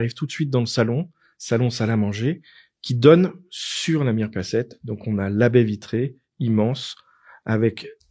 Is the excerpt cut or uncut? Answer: uncut